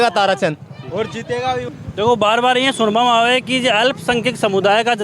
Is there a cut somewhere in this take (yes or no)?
yes